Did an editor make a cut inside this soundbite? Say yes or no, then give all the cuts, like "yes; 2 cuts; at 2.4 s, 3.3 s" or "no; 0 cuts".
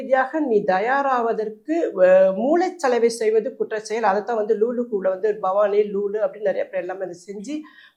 no; 0 cuts